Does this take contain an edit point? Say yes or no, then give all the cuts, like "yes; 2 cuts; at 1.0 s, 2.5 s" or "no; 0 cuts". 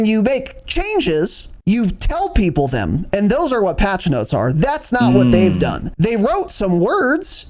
yes; 2 cuts; at 1.5 s, 5.8 s